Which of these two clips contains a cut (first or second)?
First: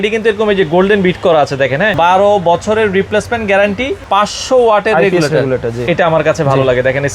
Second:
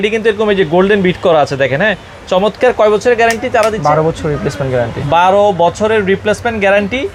first